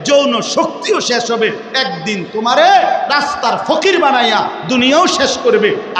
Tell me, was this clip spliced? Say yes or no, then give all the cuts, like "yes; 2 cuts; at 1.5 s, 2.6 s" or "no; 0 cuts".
no; 0 cuts